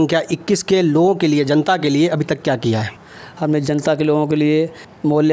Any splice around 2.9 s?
no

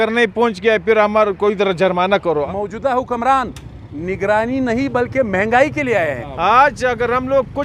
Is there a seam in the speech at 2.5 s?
yes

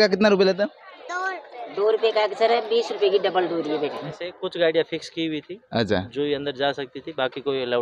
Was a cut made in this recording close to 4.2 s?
yes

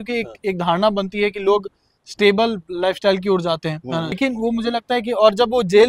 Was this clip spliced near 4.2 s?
yes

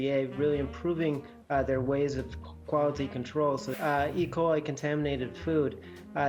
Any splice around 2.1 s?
no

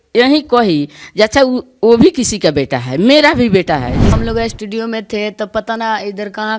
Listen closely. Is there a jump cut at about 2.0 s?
no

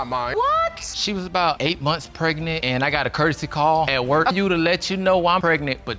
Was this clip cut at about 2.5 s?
no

